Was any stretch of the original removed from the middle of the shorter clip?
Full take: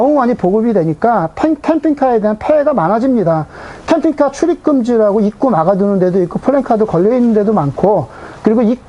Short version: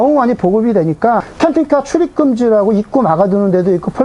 yes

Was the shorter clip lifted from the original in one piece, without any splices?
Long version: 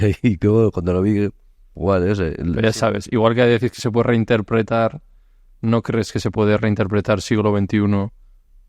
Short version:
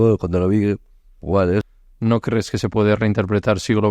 no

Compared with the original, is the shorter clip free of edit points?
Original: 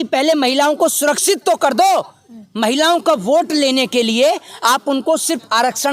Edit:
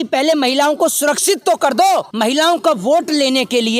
no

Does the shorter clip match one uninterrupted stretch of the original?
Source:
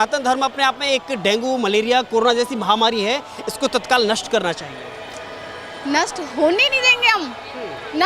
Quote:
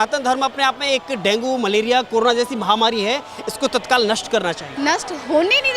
no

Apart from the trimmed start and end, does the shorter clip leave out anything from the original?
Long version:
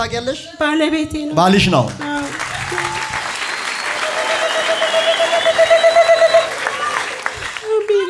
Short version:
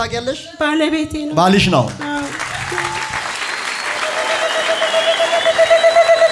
no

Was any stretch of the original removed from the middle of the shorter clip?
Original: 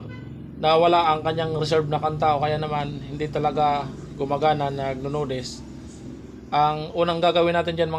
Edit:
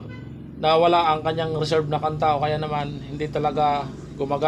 no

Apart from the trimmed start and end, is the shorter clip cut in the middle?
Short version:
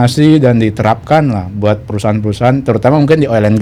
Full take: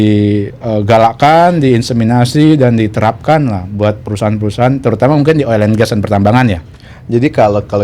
no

